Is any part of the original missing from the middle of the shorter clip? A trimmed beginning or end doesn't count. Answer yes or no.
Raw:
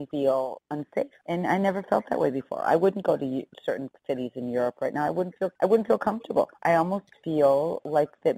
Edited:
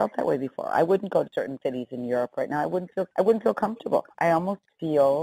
yes